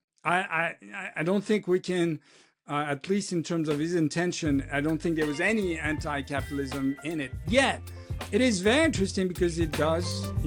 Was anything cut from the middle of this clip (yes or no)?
no